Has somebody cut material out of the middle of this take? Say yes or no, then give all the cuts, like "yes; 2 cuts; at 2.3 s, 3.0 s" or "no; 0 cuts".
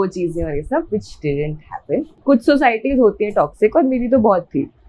yes; 1 cut; at 2.1 s